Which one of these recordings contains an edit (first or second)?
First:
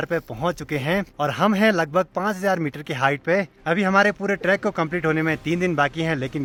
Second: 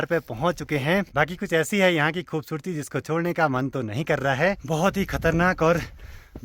second